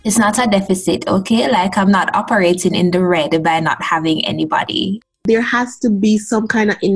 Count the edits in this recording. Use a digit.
1